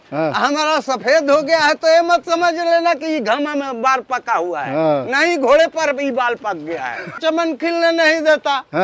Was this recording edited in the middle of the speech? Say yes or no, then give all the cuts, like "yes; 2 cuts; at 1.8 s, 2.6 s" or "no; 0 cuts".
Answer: yes; 1 cut; at 7.2 s